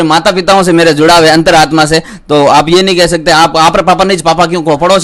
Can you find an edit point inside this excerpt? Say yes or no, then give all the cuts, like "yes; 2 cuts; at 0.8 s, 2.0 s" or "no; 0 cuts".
no; 0 cuts